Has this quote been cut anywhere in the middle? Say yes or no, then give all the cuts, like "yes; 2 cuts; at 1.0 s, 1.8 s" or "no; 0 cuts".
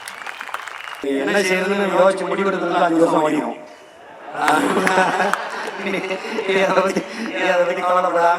yes; 1 cut; at 1.0 s